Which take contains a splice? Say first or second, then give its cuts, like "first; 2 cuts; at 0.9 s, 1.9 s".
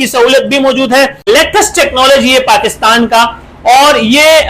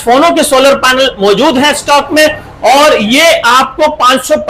first; 1 cut; at 1.3 s